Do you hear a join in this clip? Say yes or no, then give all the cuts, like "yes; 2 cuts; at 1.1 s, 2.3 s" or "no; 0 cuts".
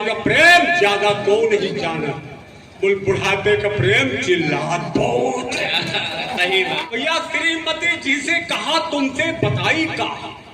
yes; 1 cut; at 6.8 s